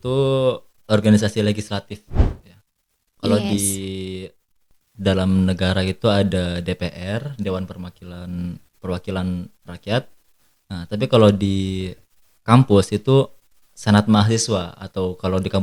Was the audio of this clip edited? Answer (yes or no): no